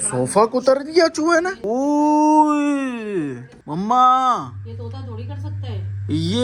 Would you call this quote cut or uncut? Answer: uncut